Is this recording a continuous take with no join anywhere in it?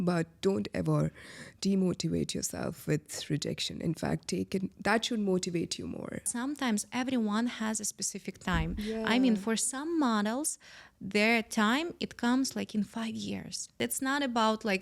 no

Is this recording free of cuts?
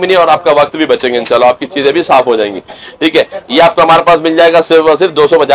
yes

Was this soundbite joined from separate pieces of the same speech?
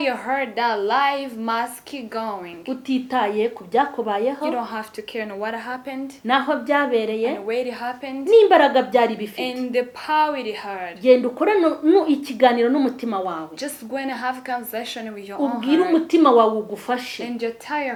no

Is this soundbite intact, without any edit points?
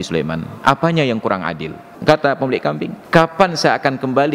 no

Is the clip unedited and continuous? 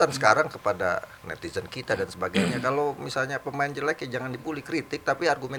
yes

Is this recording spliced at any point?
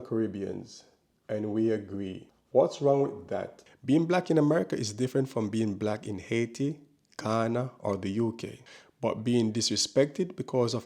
yes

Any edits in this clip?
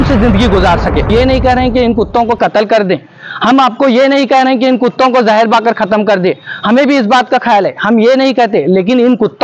yes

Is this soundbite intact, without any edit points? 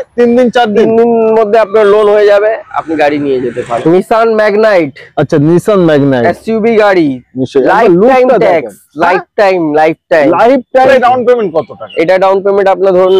no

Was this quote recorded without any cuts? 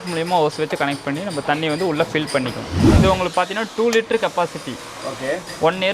no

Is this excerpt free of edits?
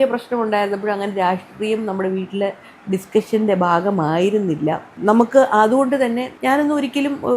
yes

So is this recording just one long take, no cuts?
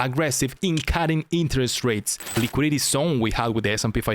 no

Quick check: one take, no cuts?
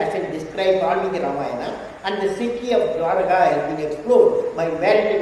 yes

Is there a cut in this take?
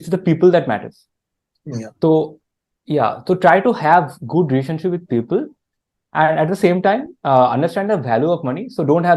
no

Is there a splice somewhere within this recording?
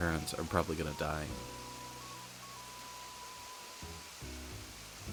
no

